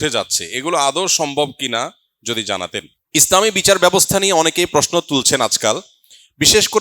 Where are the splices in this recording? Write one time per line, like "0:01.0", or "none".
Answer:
0:03.0